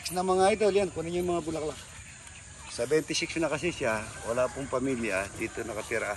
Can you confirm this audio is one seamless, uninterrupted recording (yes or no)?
yes